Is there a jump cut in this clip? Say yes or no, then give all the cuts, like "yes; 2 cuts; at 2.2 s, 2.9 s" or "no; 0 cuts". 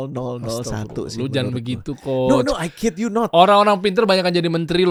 no; 0 cuts